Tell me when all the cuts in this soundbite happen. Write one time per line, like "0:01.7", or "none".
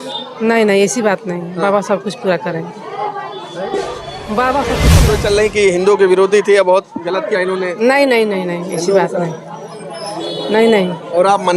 0:04.9